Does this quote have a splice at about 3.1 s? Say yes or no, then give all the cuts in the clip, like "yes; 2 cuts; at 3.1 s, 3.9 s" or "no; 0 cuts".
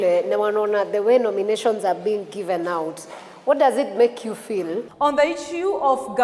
no; 1 cut; at 4.8 s